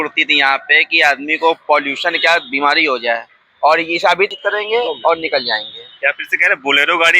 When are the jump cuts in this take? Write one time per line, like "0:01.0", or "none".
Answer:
0:04.3